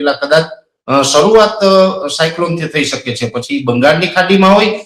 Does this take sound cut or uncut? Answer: uncut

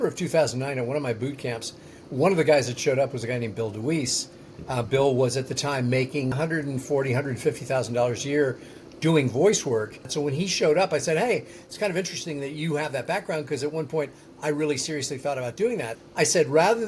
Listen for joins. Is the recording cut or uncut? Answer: cut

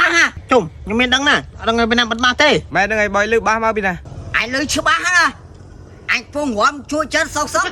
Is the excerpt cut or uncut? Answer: uncut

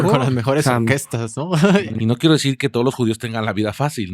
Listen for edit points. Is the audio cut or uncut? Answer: cut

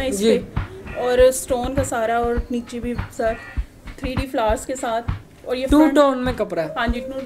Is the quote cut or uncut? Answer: uncut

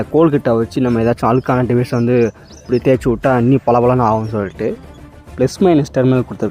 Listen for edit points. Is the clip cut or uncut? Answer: cut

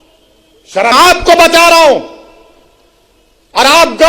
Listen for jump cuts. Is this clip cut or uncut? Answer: cut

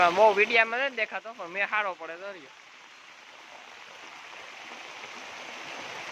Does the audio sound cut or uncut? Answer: uncut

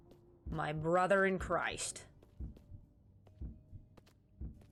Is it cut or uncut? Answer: uncut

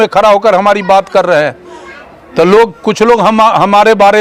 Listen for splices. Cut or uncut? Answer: uncut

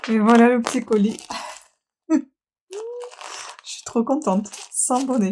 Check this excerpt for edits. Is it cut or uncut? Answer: uncut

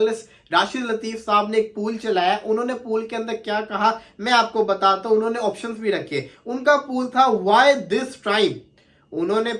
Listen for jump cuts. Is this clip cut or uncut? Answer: uncut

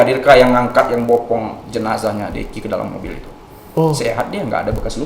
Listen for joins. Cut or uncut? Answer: uncut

